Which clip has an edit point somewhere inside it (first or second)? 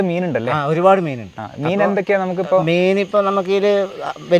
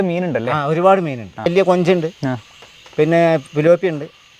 second